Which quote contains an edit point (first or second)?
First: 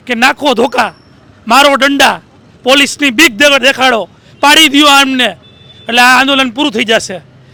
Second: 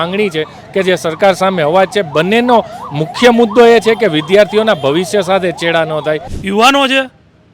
second